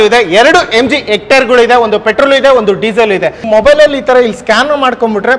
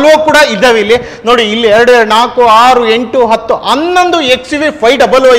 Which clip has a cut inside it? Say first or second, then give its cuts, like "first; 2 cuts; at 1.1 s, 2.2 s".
first; 1 cut; at 3.4 s